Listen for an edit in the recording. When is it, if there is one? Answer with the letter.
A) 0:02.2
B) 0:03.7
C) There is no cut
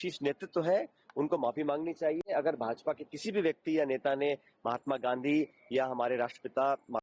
C